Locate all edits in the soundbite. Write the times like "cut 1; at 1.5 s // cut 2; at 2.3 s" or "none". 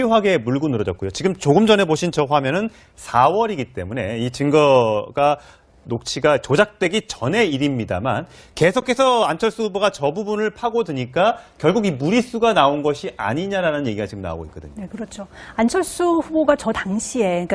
cut 1; at 16.0 s